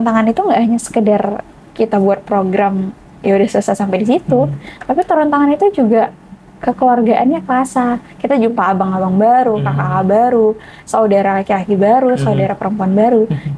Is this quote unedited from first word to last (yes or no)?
yes